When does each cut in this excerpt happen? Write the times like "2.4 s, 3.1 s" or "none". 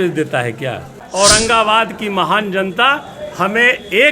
1.0 s